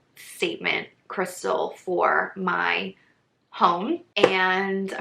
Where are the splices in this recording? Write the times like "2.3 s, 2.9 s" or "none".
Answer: 4.1 s

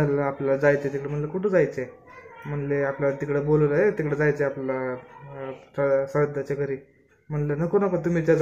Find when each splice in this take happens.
none

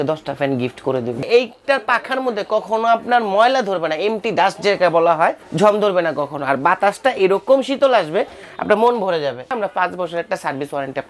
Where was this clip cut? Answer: 1.2 s, 5.4 s, 9.5 s

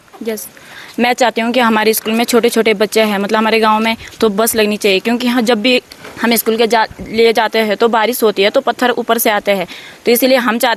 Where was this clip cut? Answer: none

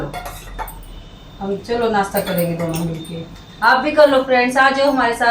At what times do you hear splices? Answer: none

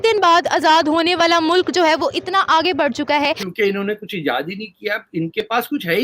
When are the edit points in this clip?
3.4 s

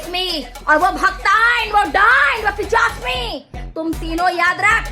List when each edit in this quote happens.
none

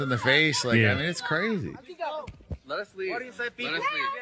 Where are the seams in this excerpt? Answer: none

